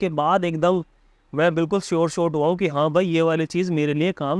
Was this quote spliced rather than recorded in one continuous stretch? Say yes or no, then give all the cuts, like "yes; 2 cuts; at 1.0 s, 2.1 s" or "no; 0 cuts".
no; 0 cuts